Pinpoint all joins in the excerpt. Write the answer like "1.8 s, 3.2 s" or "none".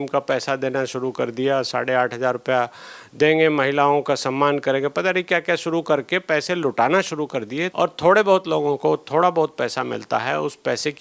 7.7 s